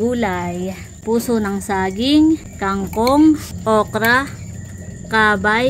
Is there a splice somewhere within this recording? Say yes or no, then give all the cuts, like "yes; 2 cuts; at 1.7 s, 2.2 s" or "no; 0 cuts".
yes; 3 cuts; at 1.0 s, 2.6 s, 3.5 s